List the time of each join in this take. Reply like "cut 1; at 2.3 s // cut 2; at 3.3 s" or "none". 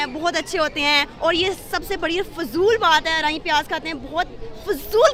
none